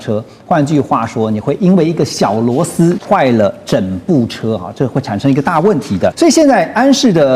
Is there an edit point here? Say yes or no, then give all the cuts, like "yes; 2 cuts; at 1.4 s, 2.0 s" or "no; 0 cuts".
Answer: yes; 2 cuts; at 3.0 s, 6.1 s